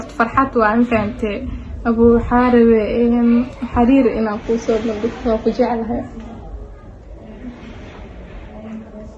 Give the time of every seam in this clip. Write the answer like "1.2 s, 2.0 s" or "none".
6.3 s